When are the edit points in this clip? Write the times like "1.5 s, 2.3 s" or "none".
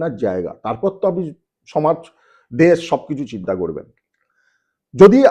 none